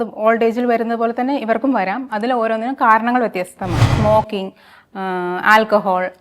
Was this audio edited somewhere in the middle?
yes; 1 cut; at 3.9 s

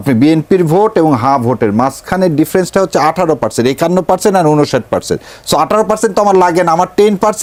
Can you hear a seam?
no; 0 cuts

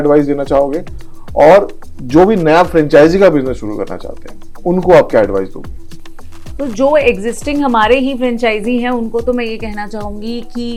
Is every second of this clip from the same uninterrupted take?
yes; 0 cuts

